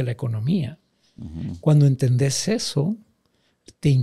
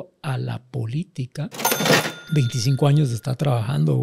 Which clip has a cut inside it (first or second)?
second